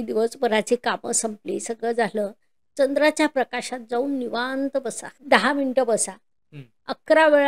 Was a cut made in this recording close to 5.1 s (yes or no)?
yes